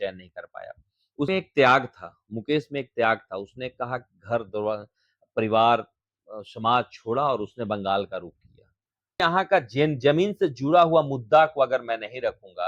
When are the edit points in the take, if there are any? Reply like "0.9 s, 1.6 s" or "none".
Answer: 1.3 s, 9.2 s